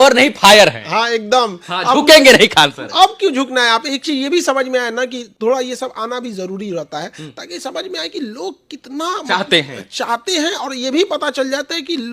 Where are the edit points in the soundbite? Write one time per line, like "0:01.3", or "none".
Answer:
none